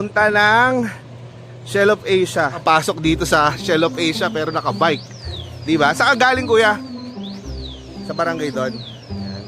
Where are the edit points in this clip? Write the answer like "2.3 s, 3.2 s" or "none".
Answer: 2.6 s